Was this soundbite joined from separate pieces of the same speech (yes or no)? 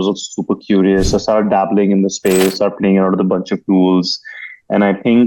no